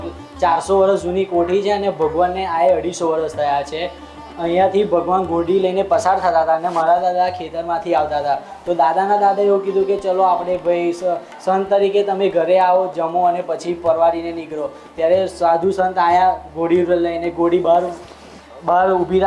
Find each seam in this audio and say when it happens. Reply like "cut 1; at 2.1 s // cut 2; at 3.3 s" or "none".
none